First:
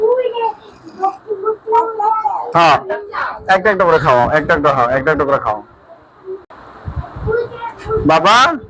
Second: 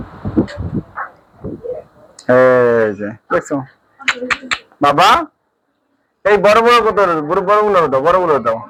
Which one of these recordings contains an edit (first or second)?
first